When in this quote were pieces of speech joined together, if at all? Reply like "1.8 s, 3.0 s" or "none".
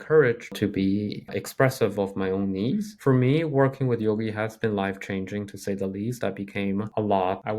2.9 s